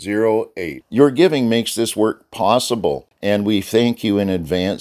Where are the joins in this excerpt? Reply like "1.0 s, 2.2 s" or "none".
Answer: 3.1 s